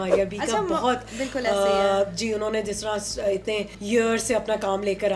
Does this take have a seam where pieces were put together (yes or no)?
yes